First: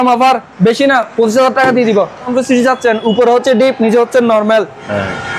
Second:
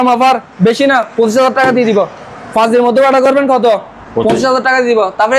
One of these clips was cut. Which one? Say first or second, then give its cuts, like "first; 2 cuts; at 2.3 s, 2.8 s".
first; 1 cut; at 2.3 s